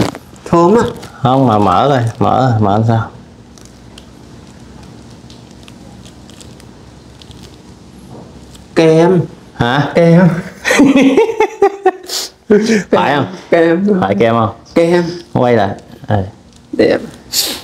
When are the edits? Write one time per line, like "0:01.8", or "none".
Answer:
none